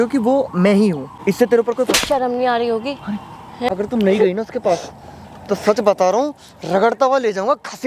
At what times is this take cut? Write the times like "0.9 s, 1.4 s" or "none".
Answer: 1.1 s, 3.7 s